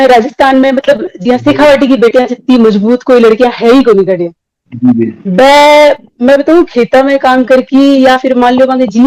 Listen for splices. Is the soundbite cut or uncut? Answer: uncut